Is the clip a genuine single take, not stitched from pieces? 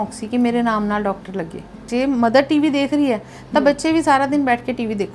no; 1 cut; at 1.8 s

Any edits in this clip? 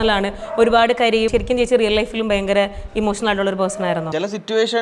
yes; 2 cuts; at 1.3 s, 4.1 s

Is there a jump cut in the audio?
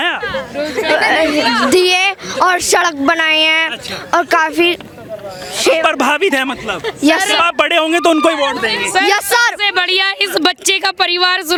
no; 0 cuts

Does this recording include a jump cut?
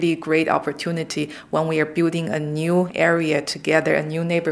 no; 0 cuts

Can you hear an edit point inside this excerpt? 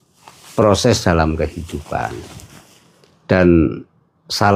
no; 0 cuts

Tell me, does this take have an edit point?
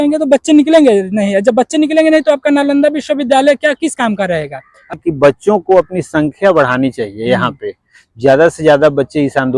yes; 1 cut; at 5.0 s

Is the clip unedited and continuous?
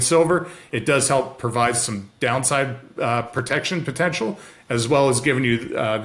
yes; 0 cuts

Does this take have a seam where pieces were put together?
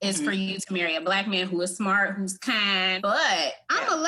yes; 1 cut; at 2.9 s

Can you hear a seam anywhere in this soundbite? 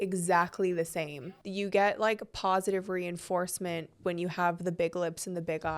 yes; 1 cut; at 1.4 s

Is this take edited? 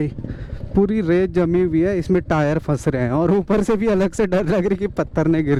no; 0 cuts

